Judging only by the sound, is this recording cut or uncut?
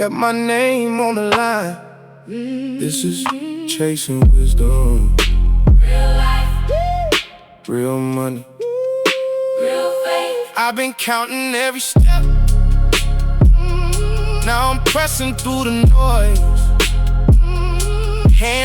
cut